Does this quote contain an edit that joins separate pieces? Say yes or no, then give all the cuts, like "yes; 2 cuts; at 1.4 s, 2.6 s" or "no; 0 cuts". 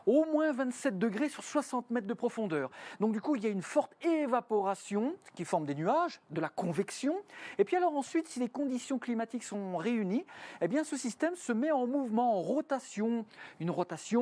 yes; 1 cut; at 5.4 s